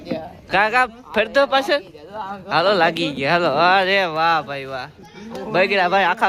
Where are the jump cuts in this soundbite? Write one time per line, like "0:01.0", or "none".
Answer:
none